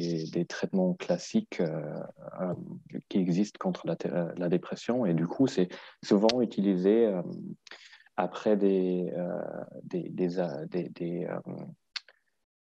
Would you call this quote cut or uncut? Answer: uncut